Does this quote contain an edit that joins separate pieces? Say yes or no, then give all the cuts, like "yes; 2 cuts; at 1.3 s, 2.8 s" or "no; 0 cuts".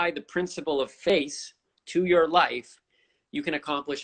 yes; 1 cut; at 1.1 s